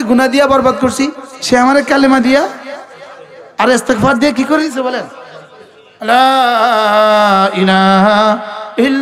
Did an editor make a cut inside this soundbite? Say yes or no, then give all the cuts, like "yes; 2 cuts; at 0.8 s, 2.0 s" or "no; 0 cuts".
yes; 1 cut; at 1.3 s